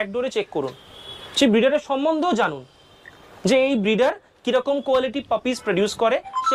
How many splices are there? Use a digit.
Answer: 0